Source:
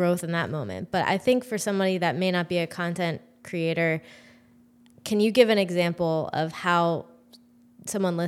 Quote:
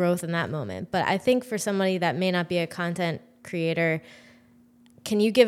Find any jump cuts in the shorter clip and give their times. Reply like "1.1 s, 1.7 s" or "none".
none